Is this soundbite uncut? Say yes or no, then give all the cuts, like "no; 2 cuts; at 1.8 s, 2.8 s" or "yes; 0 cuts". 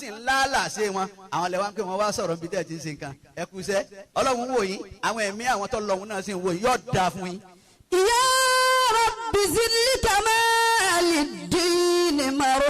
yes; 0 cuts